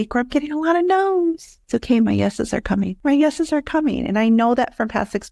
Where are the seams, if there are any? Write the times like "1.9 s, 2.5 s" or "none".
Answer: 1.5 s, 2.9 s